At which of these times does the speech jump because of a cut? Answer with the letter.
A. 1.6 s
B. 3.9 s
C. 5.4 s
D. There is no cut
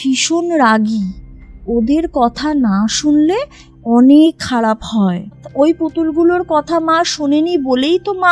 C